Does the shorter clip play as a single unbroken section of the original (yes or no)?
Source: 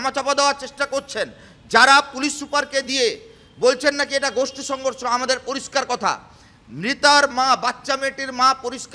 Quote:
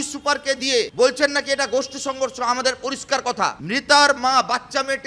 no